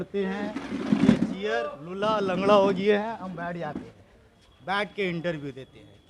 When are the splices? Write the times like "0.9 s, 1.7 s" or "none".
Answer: none